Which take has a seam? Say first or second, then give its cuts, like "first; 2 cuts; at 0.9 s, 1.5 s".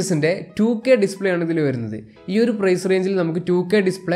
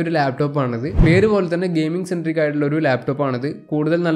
second; 1 cut; at 0.9 s